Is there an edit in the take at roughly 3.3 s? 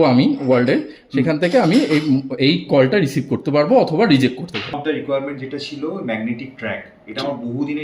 no; 1 cut; at 4.8 s

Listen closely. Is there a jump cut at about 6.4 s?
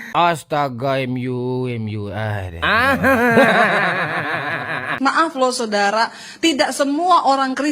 no; 1 cut; at 4.9 s

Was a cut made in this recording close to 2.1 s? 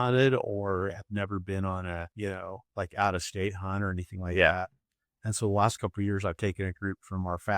yes; 1 cut; at 2.1 s

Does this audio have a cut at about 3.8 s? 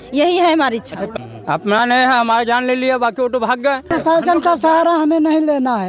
yes; 2 cuts; at 1.1 s, 3.8 s

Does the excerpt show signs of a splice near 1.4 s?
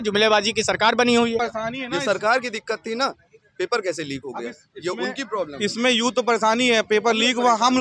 yes; 1 cut; at 1.4 s

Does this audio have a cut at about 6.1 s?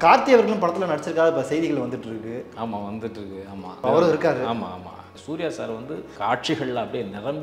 yes; 3 cuts; at 3.8 s, 5.1 s, 6.1 s

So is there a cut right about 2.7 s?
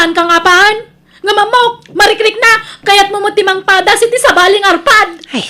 yes; 1 cut; at 2.7 s

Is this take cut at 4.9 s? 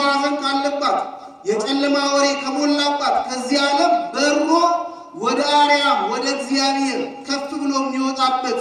no; 0 cuts

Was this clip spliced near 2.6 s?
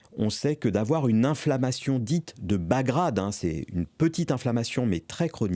no; 0 cuts

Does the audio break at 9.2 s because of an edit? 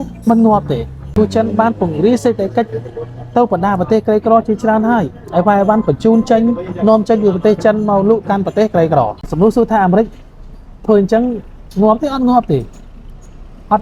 yes; 2 cuts; at 1.0 s, 9.2 s

